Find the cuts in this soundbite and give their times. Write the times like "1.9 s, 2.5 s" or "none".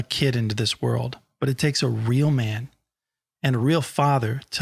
none

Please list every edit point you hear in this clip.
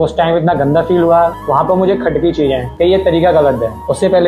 1.4 s

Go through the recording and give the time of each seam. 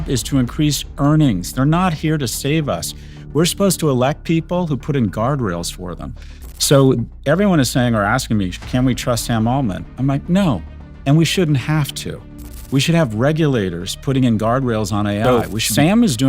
15.2 s

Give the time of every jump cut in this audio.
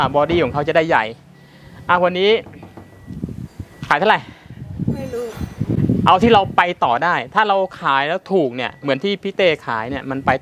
none

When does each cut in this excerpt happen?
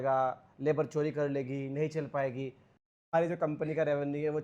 3.0 s

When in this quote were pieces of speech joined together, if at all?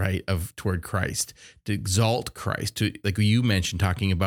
none

